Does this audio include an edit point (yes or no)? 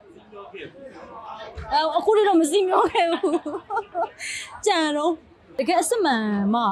yes